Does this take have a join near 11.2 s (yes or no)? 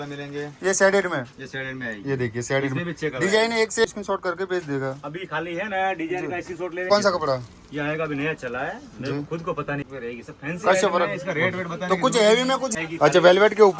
no